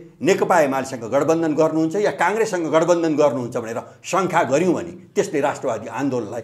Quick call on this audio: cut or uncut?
uncut